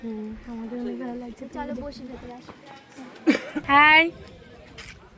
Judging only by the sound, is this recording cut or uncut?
cut